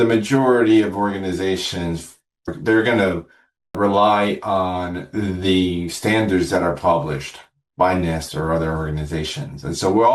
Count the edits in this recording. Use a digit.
1